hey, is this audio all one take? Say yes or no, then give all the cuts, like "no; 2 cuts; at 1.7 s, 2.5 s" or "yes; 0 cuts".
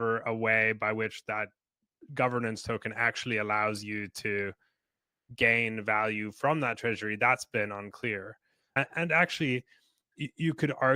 no; 1 cut; at 8.8 s